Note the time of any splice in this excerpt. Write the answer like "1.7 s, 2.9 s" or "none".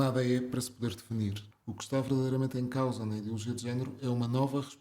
1.5 s